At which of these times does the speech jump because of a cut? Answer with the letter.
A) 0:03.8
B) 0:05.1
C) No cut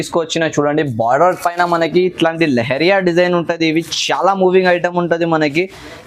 C